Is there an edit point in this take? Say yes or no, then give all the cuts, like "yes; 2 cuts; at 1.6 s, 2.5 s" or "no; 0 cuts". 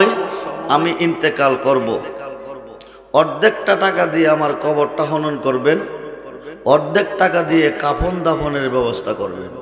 no; 0 cuts